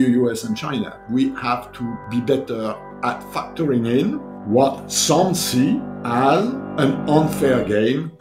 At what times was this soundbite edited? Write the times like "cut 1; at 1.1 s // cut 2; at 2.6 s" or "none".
cut 1; at 1.0 s // cut 2; at 2.0 s // cut 3; at 3.3 s // cut 4; at 4.3 s // cut 5; at 5.9 s // cut 6; at 6.6 s